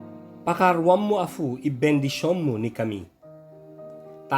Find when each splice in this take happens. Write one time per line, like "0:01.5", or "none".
none